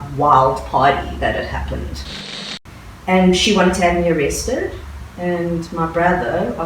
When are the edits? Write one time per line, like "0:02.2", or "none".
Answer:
0:02.4